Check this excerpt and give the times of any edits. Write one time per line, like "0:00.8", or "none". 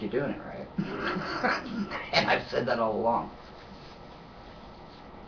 0:03.1